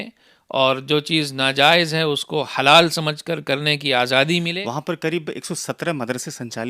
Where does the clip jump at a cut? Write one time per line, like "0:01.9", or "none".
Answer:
0:04.5